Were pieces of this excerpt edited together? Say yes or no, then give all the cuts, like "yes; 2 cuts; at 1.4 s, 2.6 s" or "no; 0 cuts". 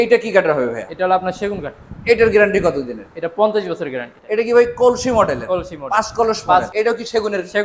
yes; 2 cuts; at 4.1 s, 6.7 s